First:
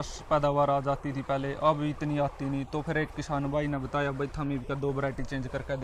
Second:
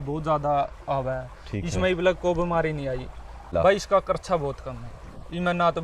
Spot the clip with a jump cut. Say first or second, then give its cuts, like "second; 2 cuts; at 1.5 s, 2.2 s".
second; 1 cut; at 3.5 s